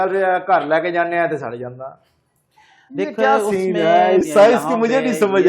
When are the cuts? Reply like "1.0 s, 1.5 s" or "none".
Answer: 4.2 s